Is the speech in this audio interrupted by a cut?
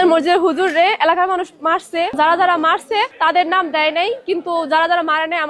yes; 2 cuts; at 2.1 s, 3.1 s

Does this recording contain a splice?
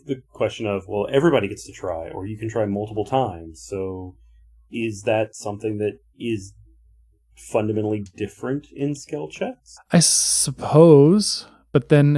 yes; 1 cut; at 9.7 s

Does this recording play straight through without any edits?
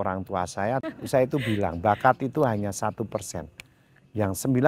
no; 1 cut; at 0.9 s

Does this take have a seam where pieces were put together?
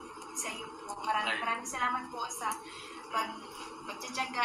no; 0 cuts

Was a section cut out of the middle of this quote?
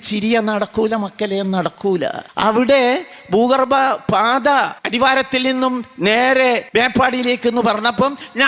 yes; 3 cuts; at 2.2 s, 4.8 s, 6.6 s

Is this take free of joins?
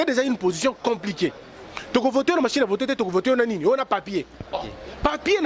yes; 0 cuts

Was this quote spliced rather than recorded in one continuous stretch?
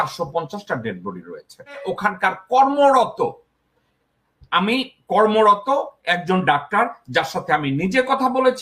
yes; 1 cut; at 1.8 s

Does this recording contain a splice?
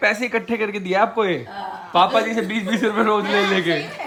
no; 0 cuts

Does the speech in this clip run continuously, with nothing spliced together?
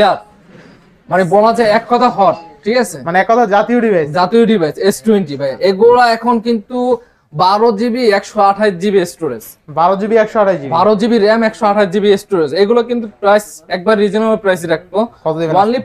yes; 0 cuts

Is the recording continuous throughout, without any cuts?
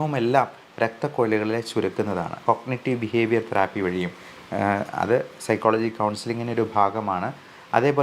no; 1 cut; at 2.4 s

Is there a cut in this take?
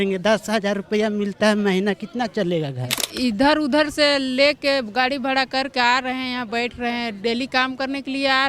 yes; 1 cut; at 3.0 s

